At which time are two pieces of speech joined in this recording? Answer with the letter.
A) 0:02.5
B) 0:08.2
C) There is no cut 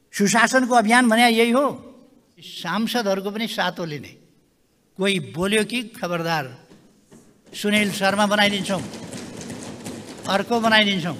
A